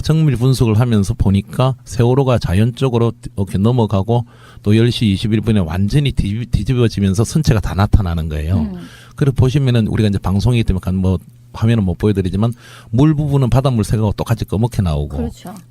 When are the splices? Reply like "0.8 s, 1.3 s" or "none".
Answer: 1.5 s